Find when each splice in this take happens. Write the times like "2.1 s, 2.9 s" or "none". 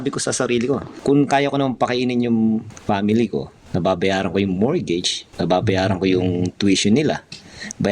0.9 s, 2.7 s, 3.6 s, 5.2 s